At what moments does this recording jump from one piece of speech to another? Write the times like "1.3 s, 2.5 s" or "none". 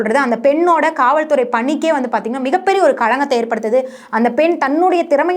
none